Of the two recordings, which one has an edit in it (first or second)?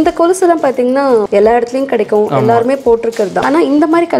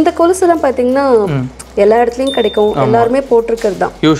first